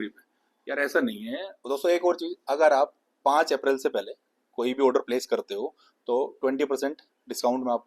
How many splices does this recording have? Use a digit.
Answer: 1